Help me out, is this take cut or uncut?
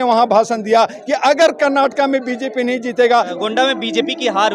cut